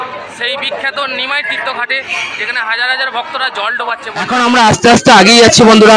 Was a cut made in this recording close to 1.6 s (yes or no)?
no